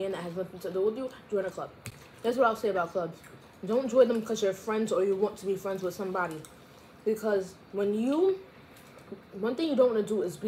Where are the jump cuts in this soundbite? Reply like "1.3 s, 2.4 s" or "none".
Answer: none